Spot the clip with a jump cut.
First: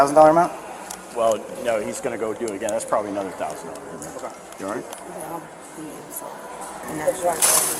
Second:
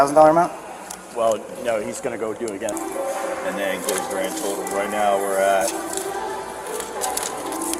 second; 1 cut; at 2.7 s

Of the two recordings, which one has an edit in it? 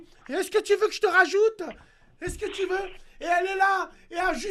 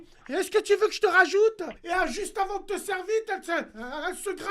second; 1 cut; at 1.7 s

